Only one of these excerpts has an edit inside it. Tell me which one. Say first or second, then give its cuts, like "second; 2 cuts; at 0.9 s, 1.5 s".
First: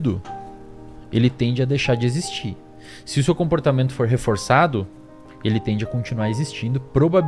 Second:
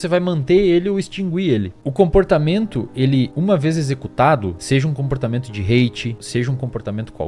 second; 4 cuts; at 1.8 s, 3.3 s, 4.6 s, 6.2 s